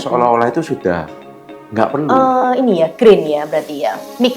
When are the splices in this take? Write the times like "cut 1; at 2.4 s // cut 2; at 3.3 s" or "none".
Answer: cut 1; at 2.1 s